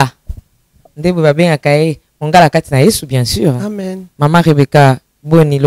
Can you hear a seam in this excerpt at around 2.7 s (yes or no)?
no